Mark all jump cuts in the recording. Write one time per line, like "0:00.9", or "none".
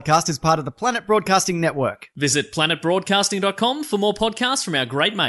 none

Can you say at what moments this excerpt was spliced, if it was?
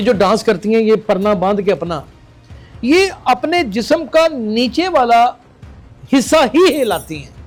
none

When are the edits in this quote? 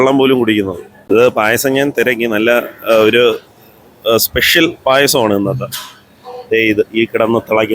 0:01.0

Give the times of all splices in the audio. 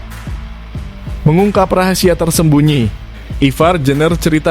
0:01.2

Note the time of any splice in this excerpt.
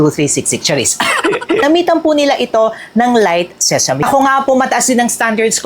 0:01.6
0:04.0

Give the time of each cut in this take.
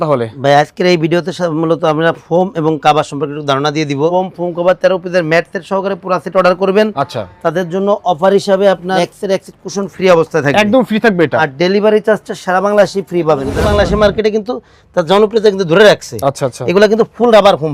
0:04.1
0:09.0
0:11.4
0:13.5

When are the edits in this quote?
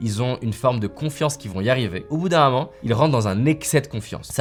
none

